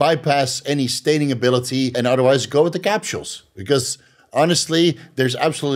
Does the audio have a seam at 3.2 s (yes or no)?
no